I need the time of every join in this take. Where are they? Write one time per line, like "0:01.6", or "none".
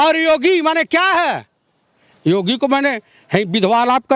none